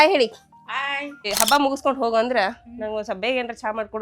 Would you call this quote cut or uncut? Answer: cut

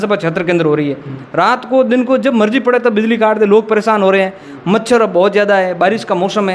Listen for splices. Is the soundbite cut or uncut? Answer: uncut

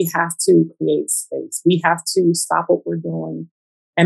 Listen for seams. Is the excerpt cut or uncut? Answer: uncut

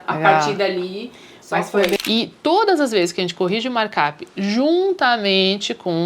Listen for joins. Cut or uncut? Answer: cut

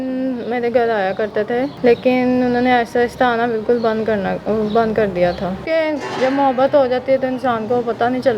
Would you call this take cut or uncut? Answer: cut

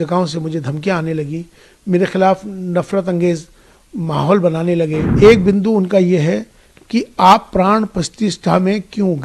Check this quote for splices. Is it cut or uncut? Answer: cut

